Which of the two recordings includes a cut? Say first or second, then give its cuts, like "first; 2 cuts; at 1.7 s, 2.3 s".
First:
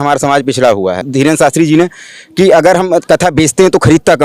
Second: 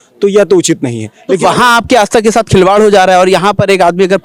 first; 1 cut; at 1.1 s